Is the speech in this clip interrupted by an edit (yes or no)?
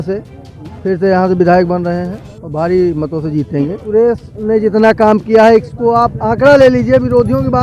yes